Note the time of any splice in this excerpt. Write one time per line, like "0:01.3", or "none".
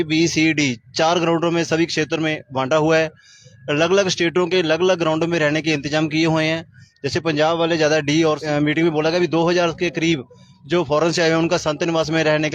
0:08.4